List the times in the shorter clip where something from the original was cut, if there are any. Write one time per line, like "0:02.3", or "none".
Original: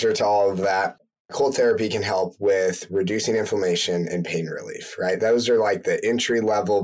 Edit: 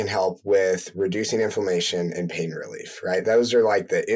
none